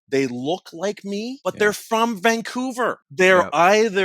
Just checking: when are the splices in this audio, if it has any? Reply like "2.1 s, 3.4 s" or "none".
1.3 s, 3.0 s